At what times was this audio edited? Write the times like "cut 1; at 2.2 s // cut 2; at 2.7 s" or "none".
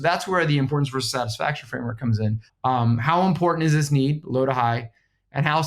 cut 1; at 2.5 s